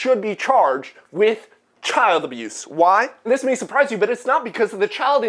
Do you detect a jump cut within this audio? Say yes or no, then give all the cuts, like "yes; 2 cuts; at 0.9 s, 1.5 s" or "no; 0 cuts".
no; 0 cuts